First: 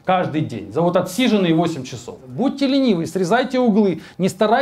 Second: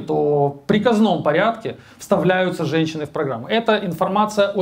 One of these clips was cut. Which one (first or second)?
first